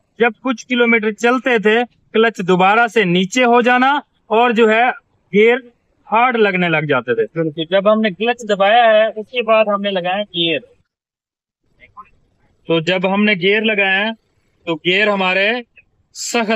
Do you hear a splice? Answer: yes; 1 cut; at 7.5 s

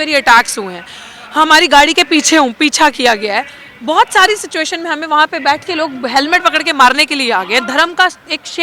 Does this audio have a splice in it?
no; 0 cuts

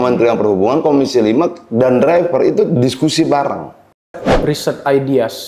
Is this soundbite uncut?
no; 1 cut; at 4.3 s

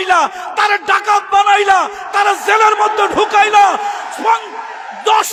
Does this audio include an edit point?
no; 0 cuts

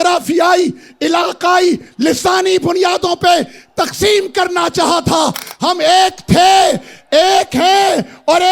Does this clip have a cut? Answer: no; 0 cuts

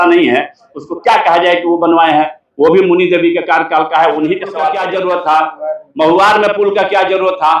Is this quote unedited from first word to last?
no; 1 cut; at 4.7 s

